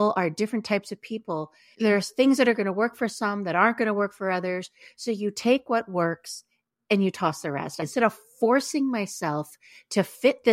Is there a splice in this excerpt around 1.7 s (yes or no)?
yes